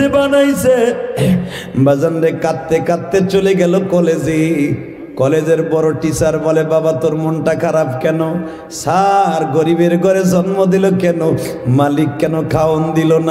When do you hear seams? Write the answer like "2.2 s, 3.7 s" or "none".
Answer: 1.6 s